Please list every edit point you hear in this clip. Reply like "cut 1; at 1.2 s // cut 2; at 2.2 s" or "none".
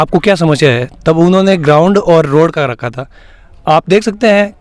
none